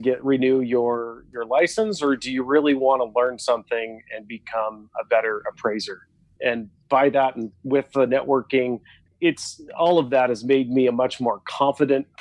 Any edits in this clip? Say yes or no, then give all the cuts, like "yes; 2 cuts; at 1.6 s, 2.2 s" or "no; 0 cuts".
yes; 2 cuts; at 7.5 s, 9.1 s